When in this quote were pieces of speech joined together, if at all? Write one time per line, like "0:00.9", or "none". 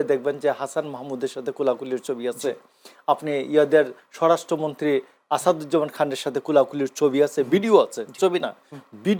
none